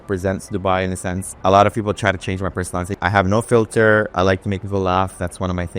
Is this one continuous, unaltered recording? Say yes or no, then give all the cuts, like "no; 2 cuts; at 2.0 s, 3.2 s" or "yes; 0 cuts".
no; 2 cuts; at 1.3 s, 3.0 s